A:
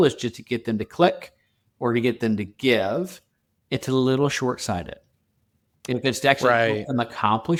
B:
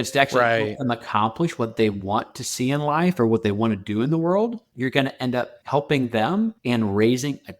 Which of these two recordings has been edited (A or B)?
B